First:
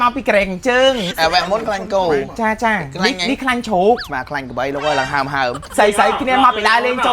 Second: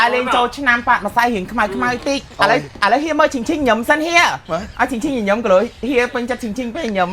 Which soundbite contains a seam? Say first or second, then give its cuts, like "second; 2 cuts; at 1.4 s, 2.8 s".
first; 3 cuts; at 1.1 s, 4.1 s, 5.6 s